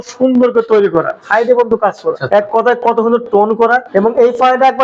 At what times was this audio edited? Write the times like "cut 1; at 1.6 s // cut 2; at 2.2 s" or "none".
cut 1; at 1.2 s // cut 2; at 2.2 s // cut 3; at 3.8 s